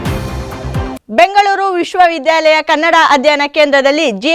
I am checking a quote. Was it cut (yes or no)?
yes